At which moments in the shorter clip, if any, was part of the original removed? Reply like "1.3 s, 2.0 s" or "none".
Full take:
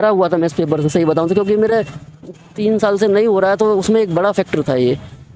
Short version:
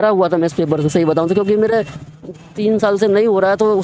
none